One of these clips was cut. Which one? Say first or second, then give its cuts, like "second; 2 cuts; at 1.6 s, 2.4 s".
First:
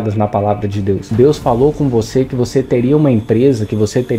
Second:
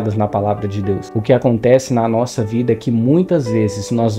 first; 1 cut; at 1.1 s